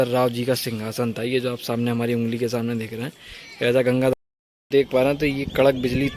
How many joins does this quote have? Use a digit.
1